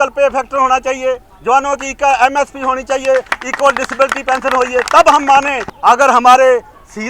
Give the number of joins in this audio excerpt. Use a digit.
1